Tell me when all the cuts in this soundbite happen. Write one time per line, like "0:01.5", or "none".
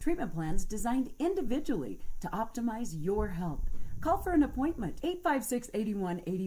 none